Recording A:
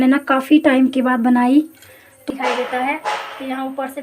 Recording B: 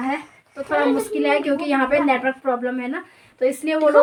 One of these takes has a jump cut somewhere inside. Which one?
A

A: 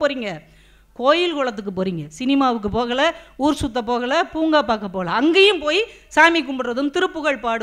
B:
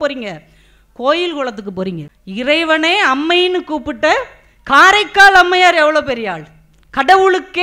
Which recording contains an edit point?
B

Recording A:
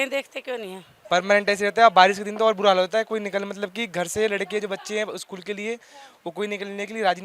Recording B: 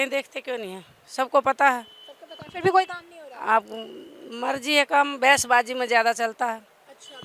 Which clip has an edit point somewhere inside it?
A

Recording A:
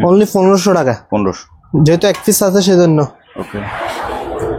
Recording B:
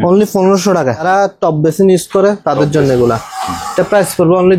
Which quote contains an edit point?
B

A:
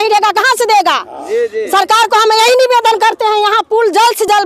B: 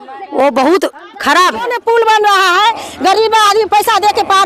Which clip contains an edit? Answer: B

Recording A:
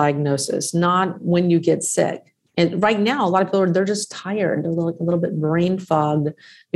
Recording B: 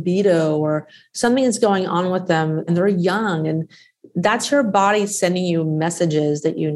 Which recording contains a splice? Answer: B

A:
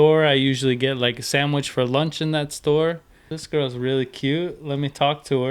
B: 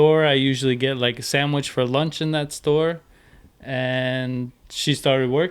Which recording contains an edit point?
A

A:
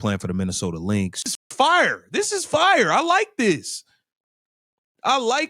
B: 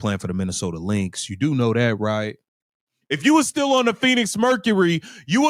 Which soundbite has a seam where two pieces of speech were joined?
A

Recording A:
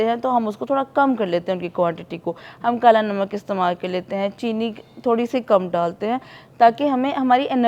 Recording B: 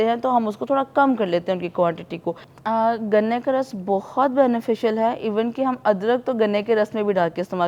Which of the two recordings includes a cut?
B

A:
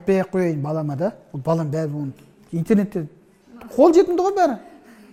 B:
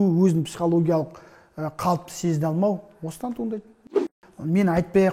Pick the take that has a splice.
B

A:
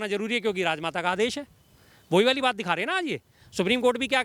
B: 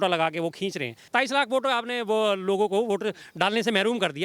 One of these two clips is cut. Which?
B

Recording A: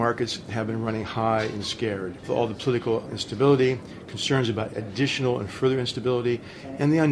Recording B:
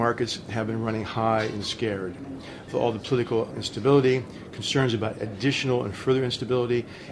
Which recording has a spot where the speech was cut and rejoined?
A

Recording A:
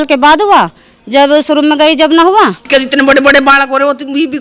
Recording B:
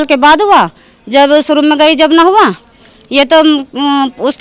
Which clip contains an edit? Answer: A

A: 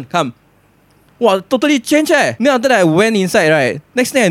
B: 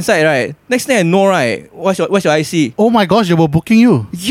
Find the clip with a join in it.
A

